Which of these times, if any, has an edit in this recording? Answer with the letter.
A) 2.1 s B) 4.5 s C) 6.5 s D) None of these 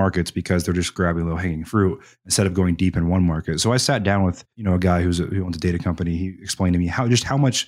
B